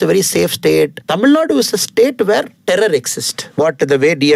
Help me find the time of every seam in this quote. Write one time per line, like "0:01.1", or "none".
0:01.0
0:02.5
0:03.5